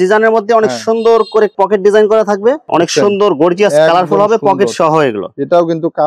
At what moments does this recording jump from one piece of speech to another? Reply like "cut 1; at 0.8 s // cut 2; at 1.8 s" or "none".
cut 1; at 2.6 s